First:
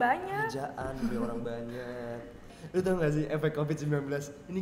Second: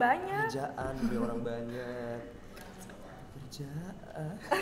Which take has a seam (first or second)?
first